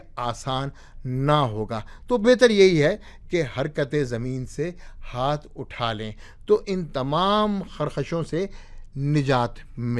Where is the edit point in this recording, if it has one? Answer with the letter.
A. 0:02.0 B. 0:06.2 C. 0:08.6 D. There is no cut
D